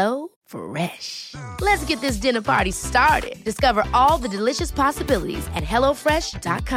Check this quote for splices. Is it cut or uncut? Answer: uncut